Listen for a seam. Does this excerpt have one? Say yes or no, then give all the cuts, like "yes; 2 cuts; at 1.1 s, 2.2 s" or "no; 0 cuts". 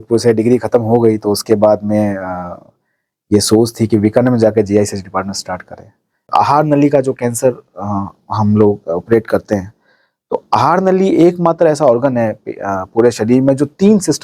yes; 1 cut; at 6.2 s